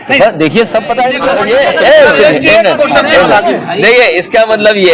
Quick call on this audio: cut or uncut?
cut